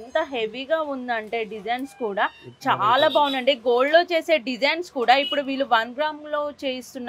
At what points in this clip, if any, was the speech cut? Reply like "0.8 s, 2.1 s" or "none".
none